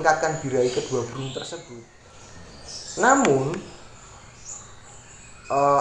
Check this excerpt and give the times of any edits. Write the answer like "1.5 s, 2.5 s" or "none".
1.6 s